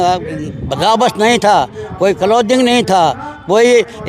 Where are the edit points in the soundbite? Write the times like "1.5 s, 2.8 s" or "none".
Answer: none